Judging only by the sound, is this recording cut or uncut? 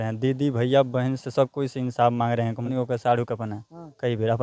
cut